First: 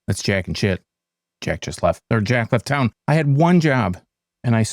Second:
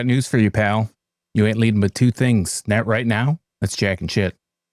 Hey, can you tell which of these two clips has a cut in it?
first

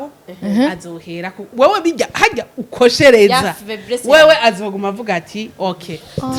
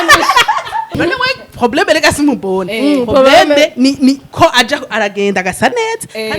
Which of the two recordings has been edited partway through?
second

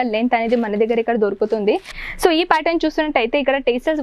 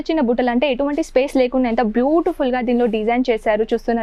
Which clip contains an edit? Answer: first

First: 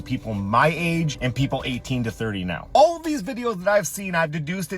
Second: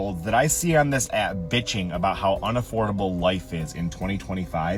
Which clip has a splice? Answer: first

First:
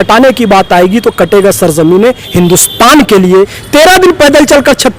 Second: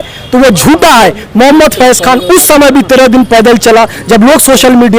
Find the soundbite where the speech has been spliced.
first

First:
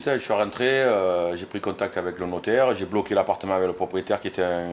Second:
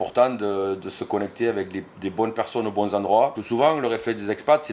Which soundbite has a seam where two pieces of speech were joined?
second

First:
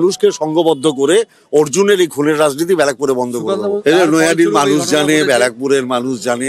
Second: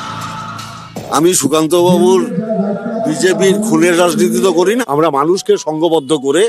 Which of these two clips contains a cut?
second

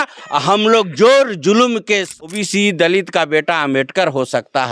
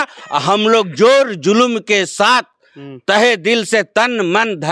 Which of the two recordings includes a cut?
first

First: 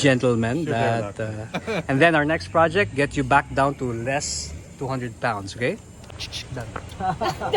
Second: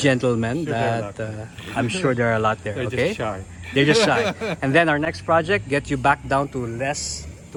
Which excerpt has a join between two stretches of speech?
first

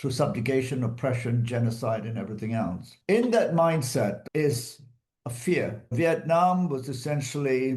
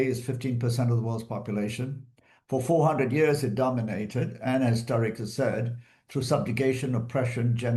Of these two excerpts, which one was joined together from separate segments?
first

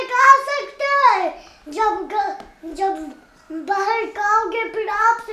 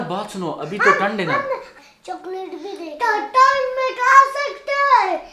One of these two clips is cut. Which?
second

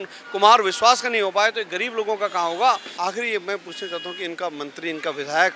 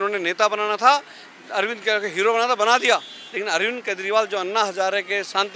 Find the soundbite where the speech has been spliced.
first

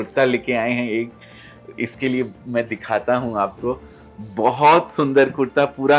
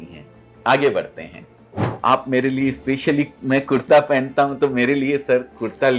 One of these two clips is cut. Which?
second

